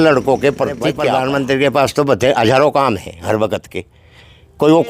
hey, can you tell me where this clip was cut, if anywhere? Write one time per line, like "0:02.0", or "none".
0:01.0